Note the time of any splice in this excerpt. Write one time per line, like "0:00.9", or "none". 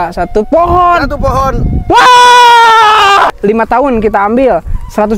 0:03.3